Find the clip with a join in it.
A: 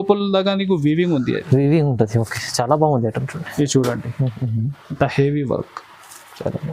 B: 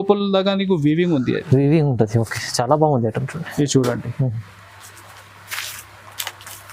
A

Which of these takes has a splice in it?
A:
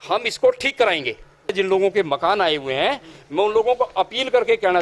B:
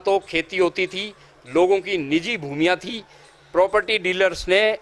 A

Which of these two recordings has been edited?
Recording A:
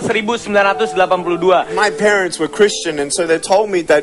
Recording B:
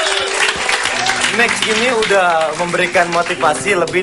A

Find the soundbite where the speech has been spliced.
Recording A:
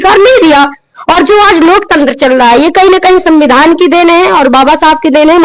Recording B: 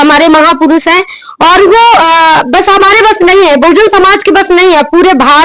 A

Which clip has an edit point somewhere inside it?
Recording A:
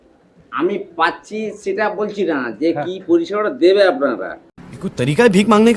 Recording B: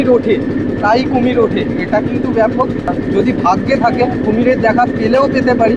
B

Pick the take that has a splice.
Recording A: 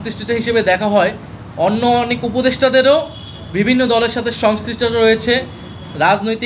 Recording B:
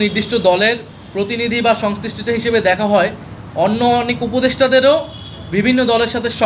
B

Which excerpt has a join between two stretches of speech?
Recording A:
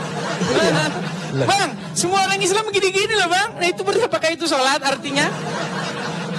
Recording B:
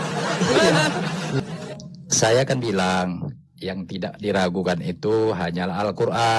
B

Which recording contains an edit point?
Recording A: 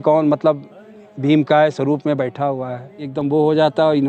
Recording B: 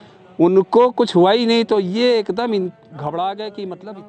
A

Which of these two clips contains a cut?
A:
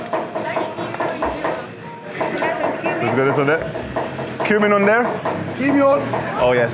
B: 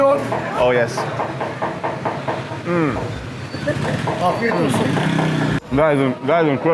B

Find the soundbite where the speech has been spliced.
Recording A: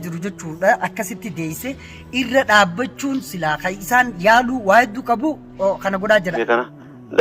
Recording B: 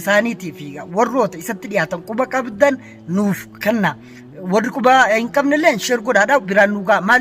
A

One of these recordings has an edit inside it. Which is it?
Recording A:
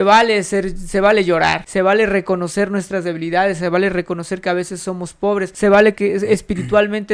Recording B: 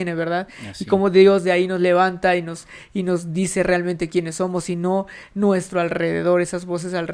A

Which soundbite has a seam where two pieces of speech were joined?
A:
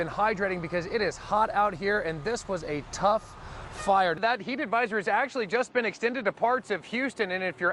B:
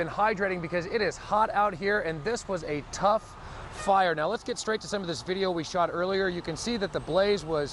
A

